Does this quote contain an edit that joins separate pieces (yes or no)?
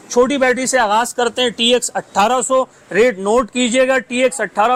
no